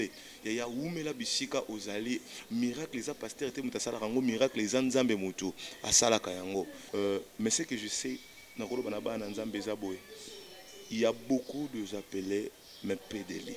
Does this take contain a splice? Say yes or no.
yes